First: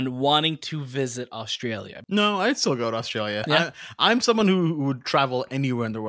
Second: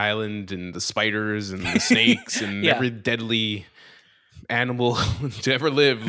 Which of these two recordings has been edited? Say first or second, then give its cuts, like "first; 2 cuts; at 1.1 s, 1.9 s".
first; 2 cuts; at 1.9 s, 3.5 s